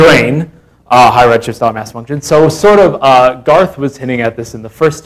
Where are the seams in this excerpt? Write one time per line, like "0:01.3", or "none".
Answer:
0:03.0